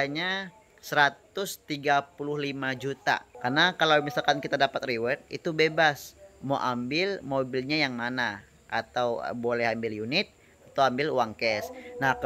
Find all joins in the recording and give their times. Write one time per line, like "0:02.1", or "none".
0:03.3